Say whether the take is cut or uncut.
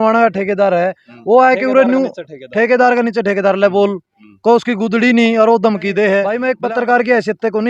cut